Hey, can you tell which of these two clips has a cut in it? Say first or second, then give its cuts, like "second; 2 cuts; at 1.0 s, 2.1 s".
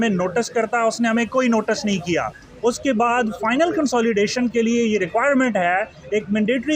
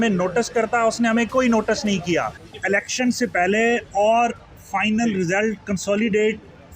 second; 1 cut; at 2.4 s